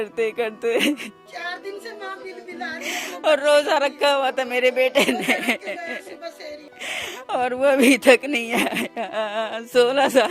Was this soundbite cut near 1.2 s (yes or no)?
yes